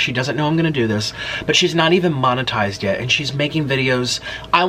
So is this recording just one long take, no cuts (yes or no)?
yes